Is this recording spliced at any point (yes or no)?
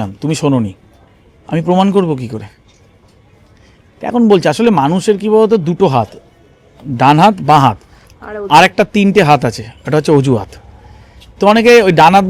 no